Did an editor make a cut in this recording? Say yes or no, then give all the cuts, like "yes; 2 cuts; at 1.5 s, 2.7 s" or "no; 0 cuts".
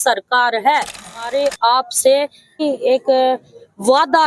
yes; 2 cuts; at 1.3 s, 2.6 s